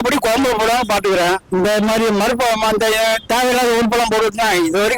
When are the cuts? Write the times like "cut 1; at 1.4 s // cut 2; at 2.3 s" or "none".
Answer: none